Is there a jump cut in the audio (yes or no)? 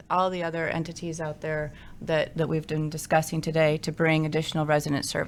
no